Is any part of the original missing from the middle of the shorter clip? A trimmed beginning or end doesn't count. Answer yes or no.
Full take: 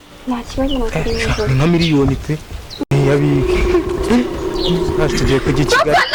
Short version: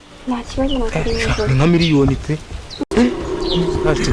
yes